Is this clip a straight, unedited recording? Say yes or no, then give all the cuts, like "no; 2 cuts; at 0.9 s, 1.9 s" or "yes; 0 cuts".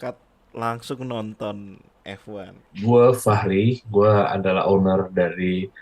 no; 1 cut; at 2.6 s